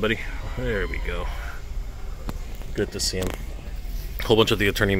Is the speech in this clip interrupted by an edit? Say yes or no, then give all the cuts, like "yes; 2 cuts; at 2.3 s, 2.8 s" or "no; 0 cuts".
no; 0 cuts